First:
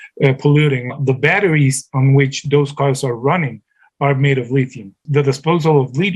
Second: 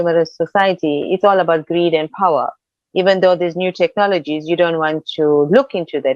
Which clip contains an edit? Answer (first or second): first